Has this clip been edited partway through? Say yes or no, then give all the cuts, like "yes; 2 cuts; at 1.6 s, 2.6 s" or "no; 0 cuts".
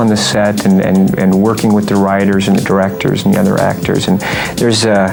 no; 0 cuts